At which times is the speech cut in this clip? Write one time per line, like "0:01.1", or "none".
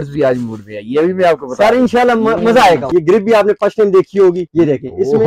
0:03.2
0:04.4